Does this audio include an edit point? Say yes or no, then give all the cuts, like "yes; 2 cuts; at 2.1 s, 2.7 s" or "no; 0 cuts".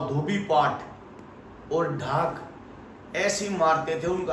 no; 0 cuts